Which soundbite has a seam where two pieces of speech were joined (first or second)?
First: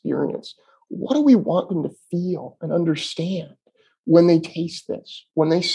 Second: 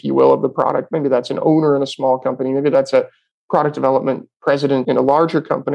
second